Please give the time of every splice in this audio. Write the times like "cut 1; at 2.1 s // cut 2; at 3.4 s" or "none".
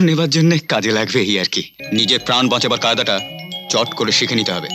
cut 1; at 1.7 s